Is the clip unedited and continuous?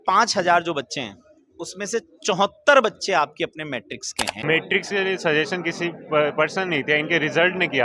no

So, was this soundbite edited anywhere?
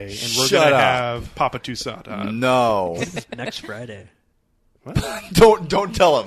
no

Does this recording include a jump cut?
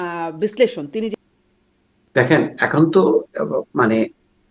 yes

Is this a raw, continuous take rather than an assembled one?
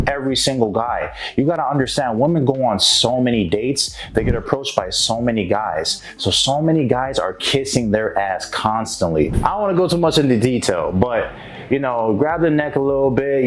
no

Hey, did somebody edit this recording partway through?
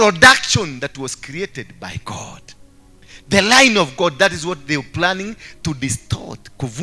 no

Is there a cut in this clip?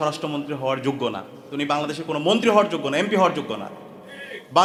no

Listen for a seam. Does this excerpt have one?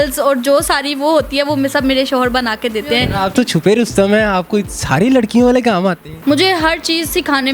yes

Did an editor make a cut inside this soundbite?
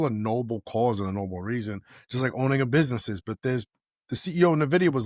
no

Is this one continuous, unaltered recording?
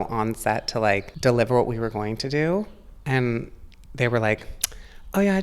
no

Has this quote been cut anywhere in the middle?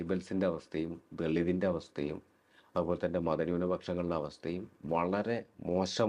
no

